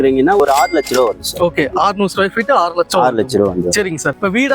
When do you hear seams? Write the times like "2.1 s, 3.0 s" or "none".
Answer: none